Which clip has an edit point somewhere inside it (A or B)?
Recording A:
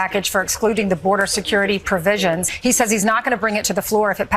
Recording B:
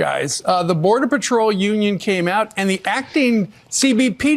A